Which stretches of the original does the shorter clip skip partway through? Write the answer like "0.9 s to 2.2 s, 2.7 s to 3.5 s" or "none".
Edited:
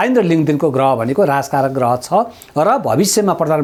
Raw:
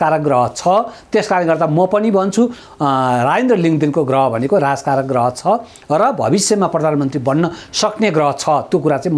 none